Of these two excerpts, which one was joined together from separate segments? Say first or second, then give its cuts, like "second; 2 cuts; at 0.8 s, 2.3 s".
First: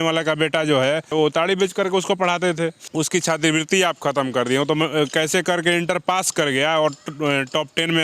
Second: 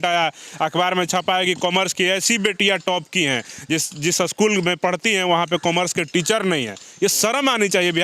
first; 2 cuts; at 1.1 s, 2.8 s